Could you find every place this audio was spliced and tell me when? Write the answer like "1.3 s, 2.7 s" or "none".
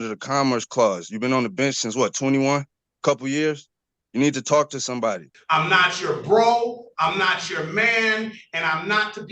5.3 s